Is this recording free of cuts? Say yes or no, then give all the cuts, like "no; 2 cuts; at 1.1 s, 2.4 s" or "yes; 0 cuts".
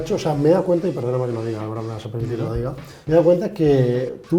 no; 1 cut; at 2.9 s